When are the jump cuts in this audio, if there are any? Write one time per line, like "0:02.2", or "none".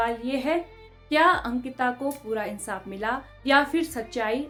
none